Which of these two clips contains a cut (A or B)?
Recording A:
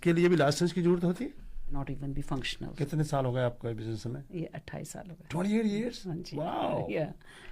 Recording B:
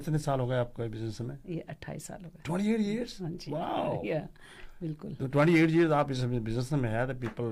A